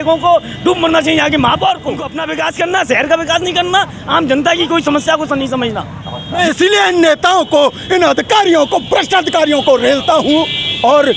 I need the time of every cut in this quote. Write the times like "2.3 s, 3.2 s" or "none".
2.2 s, 6.4 s